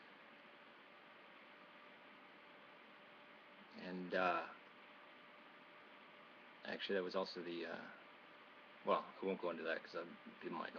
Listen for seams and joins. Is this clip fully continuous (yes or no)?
yes